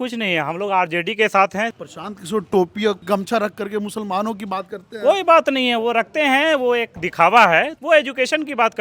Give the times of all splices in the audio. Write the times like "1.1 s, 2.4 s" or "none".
1.8 s, 3.0 s, 7.8 s